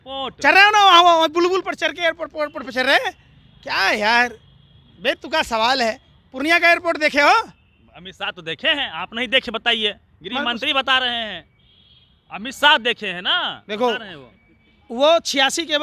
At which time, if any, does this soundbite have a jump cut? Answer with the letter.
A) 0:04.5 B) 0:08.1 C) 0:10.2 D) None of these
D